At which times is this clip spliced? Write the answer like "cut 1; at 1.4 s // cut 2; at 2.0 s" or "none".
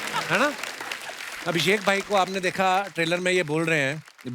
cut 1; at 1.3 s